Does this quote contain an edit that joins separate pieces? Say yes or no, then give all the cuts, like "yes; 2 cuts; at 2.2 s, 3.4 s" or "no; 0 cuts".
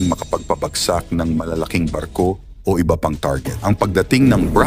yes; 1 cut; at 3.5 s